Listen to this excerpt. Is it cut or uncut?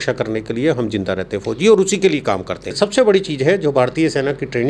cut